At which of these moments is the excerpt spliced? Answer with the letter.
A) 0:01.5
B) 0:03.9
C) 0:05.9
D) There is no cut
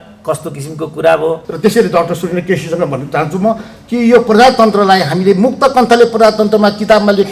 A